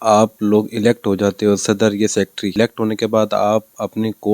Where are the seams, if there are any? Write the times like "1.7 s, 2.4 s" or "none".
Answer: 2.5 s